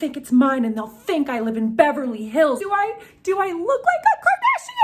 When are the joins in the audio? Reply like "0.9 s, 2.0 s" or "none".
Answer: 2.6 s